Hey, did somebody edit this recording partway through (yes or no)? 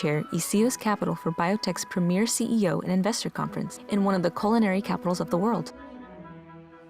yes